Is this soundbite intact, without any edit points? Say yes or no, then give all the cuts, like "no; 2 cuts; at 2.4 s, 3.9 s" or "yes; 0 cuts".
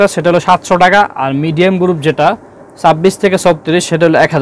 yes; 0 cuts